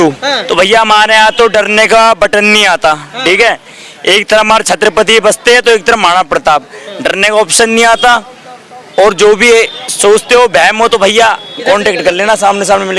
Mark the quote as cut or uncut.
uncut